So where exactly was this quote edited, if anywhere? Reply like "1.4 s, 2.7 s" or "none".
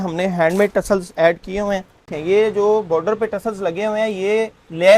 2.1 s